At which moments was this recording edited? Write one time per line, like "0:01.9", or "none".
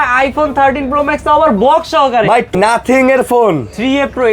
0:02.5